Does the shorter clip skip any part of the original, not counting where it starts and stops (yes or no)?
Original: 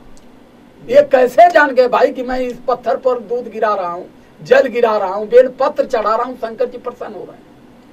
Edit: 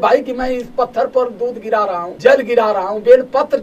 yes